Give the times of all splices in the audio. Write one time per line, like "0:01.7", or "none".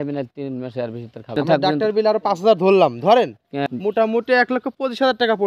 0:01.4
0:03.6